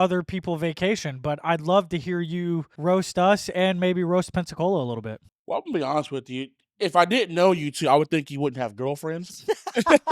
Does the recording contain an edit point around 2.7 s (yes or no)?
yes